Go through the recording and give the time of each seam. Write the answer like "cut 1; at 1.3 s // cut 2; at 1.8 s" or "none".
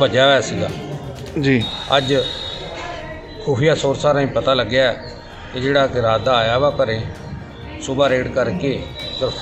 none